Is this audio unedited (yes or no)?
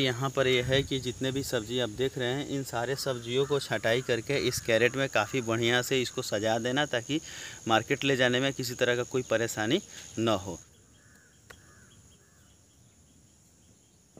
no